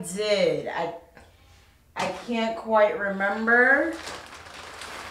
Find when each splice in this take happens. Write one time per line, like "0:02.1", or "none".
none